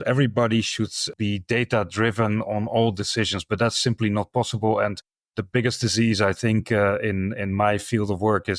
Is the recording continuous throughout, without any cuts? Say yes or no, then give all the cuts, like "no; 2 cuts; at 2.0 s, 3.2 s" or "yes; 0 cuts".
no; 1 cut; at 1.1 s